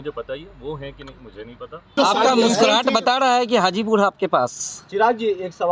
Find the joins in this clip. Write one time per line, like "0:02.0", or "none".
0:01.9

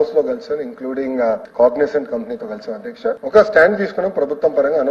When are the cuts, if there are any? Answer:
0:01.5
0:03.2

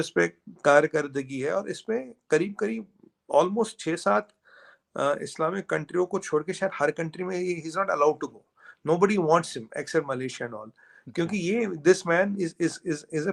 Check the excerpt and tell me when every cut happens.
none

